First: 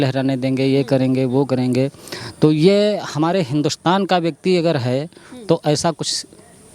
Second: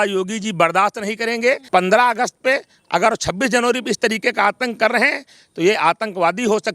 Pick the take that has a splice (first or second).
second